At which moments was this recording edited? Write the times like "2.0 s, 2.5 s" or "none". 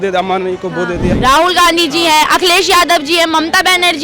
1.1 s